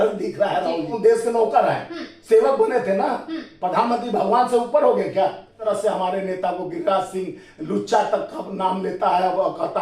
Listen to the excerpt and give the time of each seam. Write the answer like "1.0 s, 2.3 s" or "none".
0.9 s, 5.7 s